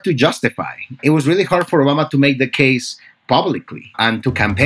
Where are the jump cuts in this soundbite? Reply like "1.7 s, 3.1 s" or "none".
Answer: 1.0 s